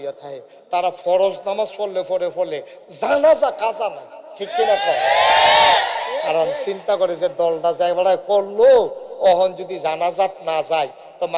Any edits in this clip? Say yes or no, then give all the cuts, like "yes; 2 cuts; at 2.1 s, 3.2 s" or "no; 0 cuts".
no; 0 cuts